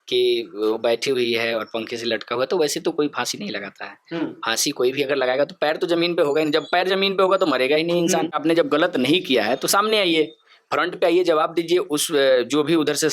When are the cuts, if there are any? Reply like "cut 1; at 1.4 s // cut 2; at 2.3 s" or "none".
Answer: cut 1; at 8.4 s